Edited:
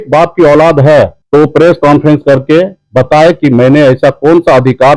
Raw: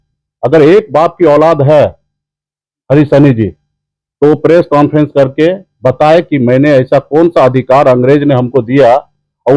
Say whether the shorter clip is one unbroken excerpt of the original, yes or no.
no